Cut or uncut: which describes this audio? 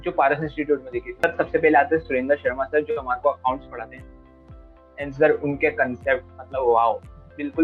cut